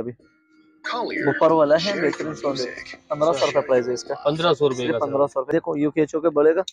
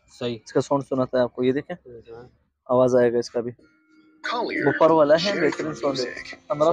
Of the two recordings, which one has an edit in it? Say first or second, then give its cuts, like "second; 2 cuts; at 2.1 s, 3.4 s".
first; 1 cut; at 5.5 s